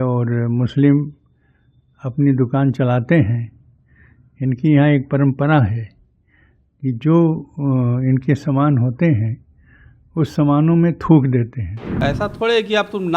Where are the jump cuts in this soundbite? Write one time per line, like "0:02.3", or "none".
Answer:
0:12.0

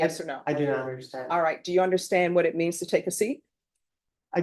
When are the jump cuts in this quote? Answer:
none

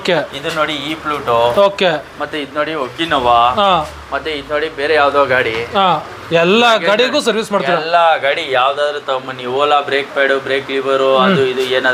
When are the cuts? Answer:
none

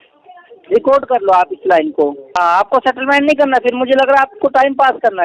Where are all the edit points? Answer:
0:02.2

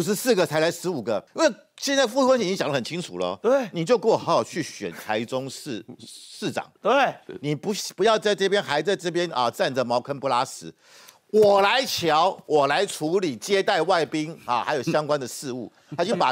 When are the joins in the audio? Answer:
none

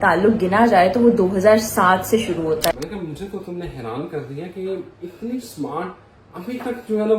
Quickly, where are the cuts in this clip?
0:02.7

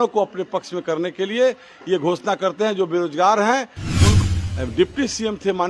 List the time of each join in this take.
0:04.1

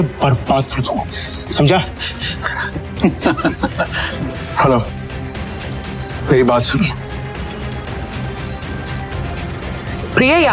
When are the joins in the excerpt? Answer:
0:04.0
0:07.8

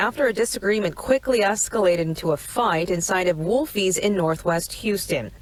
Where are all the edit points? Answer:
none

